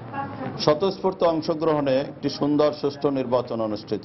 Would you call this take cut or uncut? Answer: uncut